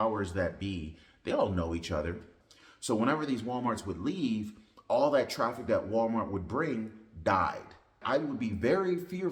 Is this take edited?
yes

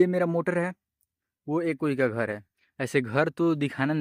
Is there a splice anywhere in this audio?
no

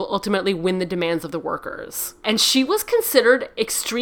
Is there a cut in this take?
yes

